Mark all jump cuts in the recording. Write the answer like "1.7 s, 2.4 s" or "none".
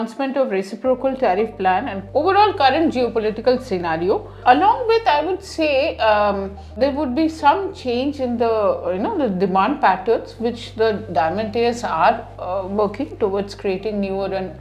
2.0 s, 4.4 s, 6.8 s